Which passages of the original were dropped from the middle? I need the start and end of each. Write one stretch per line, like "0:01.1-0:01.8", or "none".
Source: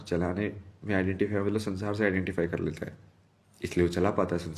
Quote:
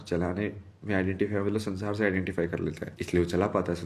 0:02.9-0:03.5